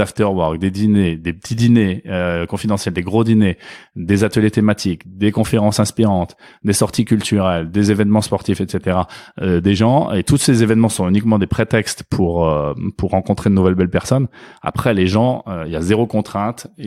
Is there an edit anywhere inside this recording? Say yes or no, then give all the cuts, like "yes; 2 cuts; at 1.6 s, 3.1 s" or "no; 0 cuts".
no; 0 cuts